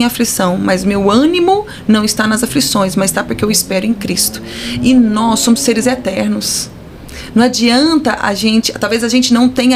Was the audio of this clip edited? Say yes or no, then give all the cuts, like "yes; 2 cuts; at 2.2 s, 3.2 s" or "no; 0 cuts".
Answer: no; 0 cuts